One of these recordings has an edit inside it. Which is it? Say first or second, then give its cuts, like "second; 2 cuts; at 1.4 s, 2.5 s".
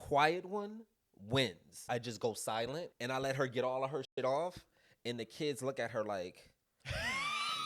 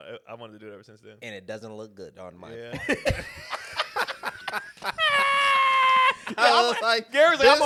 first; 2 cuts; at 1.8 s, 2.9 s